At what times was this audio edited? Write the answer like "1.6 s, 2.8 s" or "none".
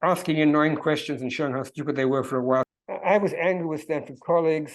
2.7 s